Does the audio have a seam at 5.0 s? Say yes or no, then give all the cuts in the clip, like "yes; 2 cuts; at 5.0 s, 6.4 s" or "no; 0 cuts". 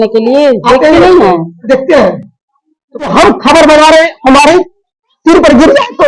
no; 1 cut; at 3.1 s